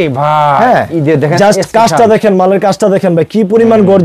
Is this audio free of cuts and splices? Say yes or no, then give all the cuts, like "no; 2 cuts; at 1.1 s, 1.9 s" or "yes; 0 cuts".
yes; 0 cuts